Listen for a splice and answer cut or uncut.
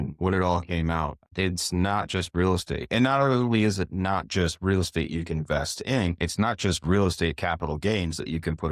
cut